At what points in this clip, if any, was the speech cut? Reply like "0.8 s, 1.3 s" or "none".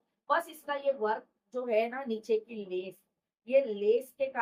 none